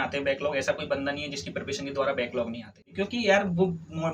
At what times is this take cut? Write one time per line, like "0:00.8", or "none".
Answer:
0:02.8